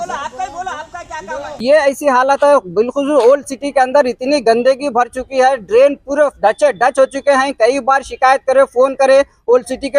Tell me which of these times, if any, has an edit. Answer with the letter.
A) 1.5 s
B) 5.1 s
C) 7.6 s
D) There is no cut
A